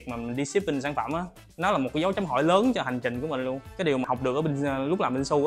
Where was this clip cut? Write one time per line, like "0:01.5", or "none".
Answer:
0:01.4
0:03.6